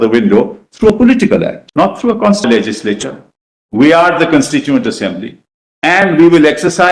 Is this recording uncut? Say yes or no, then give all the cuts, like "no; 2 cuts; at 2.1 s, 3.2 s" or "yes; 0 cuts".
no; 1 cut; at 2.5 s